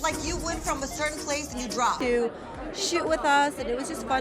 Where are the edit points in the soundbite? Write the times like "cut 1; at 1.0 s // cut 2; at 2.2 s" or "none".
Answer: cut 1; at 2.0 s